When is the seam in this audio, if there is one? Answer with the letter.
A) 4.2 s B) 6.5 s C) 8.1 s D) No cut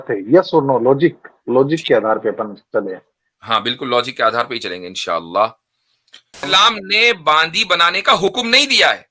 B